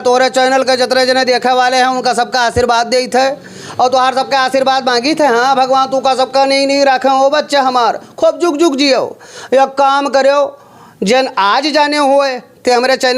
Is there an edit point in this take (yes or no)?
no